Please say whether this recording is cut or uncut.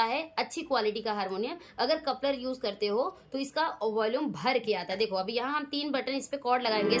uncut